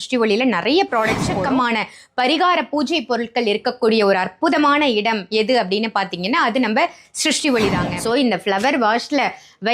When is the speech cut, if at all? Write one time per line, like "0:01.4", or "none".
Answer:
0:01.3
0:07.9